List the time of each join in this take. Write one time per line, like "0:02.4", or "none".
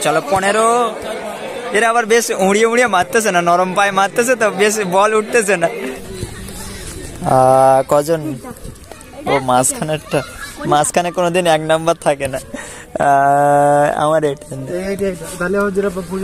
0:05.8